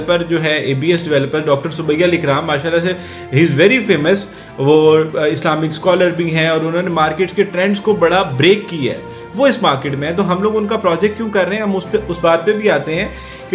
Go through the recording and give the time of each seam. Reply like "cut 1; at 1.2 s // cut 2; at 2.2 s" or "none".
none